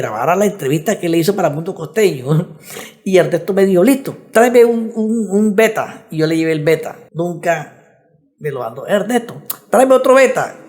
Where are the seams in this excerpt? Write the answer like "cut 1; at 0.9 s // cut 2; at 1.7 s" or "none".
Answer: cut 1; at 7.0 s